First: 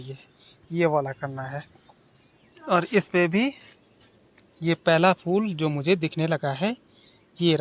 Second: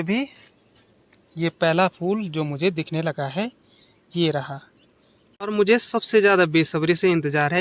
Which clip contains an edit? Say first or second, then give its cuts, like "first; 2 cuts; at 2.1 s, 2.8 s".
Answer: second; 1 cut; at 5.4 s